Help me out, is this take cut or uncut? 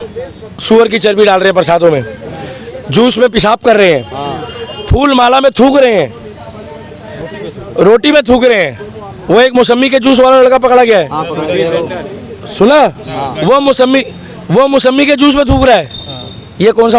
uncut